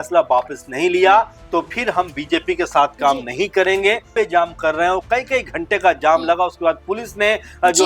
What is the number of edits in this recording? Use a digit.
1